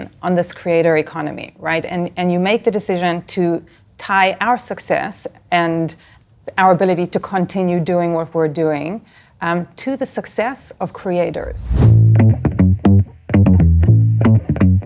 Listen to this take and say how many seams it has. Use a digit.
1